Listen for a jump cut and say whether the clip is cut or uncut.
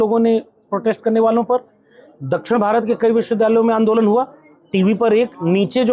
uncut